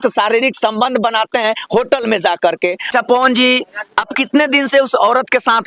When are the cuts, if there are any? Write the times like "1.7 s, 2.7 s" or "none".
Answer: 2.8 s